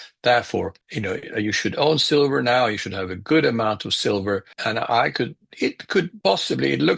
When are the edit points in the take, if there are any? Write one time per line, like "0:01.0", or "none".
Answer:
0:04.5
0:06.1